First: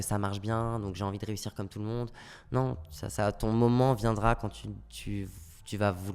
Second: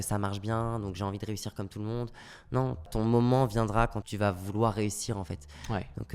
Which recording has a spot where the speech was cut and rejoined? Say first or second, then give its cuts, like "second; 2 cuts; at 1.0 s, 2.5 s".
second; 2 cuts; at 2.9 s, 4.0 s